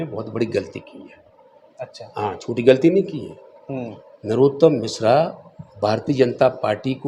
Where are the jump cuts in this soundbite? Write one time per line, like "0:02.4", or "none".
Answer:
none